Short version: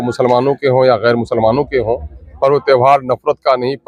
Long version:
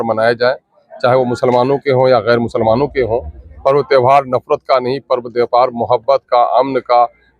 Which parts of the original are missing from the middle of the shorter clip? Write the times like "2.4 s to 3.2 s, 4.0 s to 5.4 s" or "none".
none

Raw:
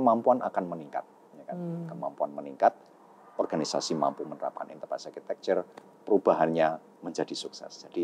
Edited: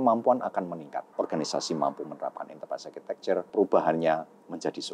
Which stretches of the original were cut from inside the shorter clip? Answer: 1.1 s to 3.3 s, 5.7 s to 6.0 s

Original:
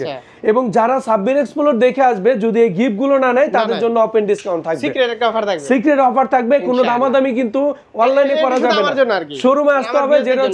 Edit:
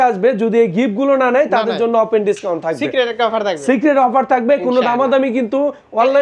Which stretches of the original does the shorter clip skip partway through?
none

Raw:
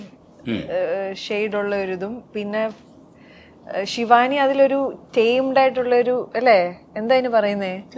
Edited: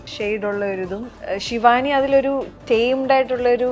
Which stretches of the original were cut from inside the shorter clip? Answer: 2.2 s to 3.6 s

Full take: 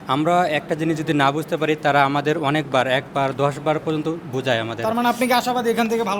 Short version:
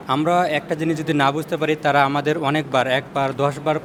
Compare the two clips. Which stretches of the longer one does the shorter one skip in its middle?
none

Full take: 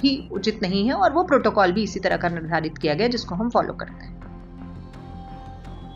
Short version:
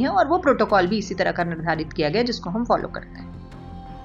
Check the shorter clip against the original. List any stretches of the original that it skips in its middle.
3.9 s to 4.5 s

